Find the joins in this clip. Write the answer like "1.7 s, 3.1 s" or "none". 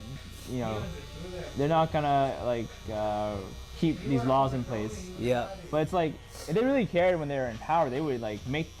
none